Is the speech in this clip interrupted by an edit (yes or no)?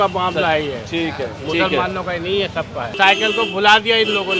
yes